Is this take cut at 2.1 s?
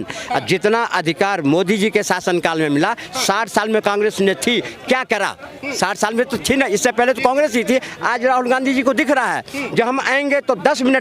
no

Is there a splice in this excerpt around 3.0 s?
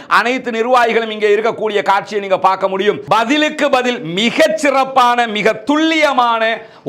yes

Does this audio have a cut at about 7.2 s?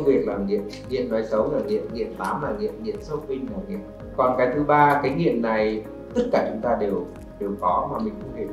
yes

